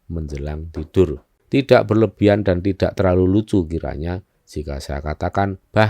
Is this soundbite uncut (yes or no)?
no